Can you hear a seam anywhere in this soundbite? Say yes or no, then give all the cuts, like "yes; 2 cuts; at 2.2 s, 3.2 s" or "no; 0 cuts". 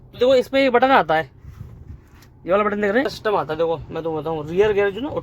yes; 1 cut; at 3.1 s